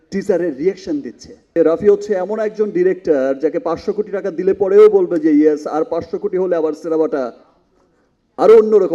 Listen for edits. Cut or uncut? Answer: cut